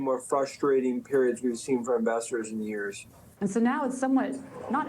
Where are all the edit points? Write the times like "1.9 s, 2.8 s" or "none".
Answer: 3.4 s

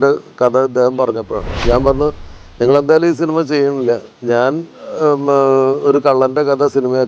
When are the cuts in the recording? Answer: 1.7 s

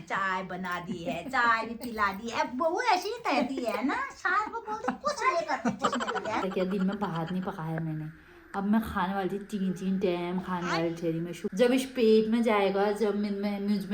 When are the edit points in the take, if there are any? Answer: 6.4 s, 11.4 s

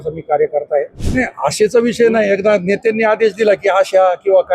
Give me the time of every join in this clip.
1.0 s

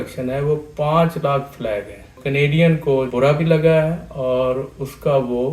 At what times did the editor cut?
2.2 s, 3.1 s

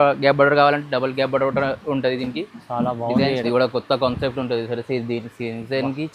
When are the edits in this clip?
3.4 s

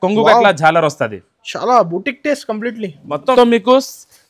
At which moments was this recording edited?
3.3 s

